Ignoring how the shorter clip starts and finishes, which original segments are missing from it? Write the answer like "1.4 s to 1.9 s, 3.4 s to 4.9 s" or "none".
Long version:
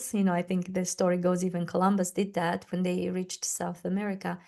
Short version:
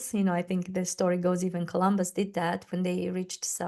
none